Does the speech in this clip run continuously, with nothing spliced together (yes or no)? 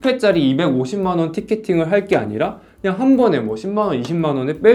yes